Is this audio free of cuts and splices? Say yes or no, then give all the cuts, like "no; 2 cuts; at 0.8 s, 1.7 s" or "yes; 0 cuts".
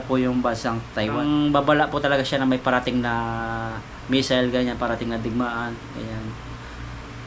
no; 1 cut; at 1.2 s